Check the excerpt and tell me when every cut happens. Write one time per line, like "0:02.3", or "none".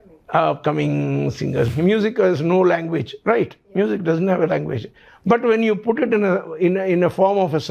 0:01.7